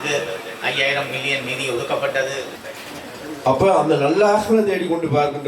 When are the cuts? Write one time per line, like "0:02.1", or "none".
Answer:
0:02.5